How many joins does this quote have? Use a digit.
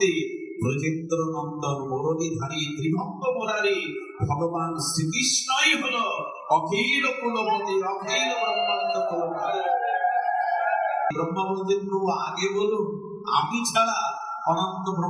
1